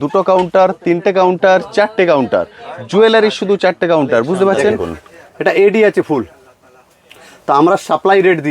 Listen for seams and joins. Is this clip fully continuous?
no; 1 cut; at 4.9 s

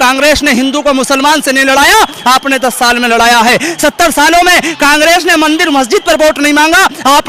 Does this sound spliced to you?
no; 0 cuts

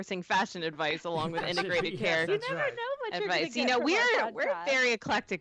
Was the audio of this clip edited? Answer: no; 0 cuts

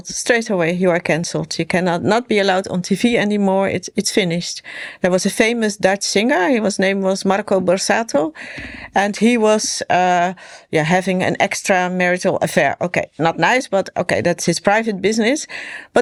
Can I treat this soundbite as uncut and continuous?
yes; 0 cuts

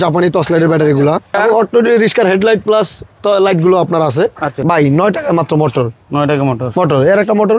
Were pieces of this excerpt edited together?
yes; 2 cuts; at 1.4 s, 4.5 s

